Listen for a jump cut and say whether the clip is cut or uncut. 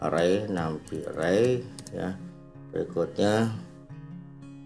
cut